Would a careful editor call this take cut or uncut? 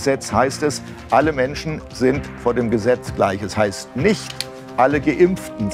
uncut